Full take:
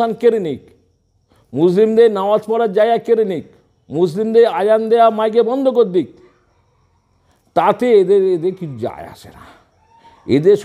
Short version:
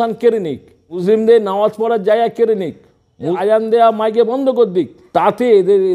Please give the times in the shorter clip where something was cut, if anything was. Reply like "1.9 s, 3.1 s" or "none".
1.0 s, 3.4 s, 5.0 s